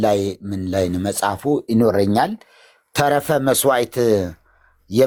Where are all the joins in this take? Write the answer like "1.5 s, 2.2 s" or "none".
none